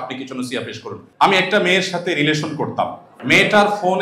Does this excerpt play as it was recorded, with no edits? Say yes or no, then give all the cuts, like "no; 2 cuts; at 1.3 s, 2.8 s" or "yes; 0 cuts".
no; 2 cuts; at 1.0 s, 3.1 s